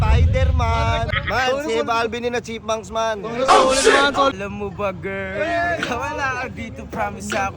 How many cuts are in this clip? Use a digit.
2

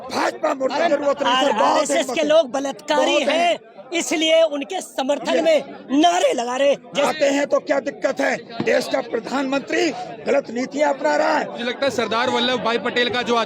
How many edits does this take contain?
3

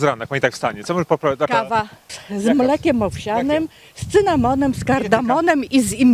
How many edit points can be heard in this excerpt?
1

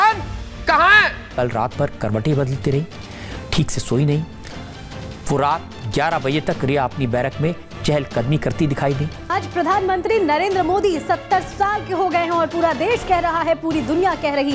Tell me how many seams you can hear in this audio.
2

